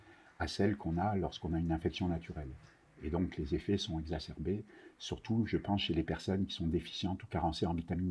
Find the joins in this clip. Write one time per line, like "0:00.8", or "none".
none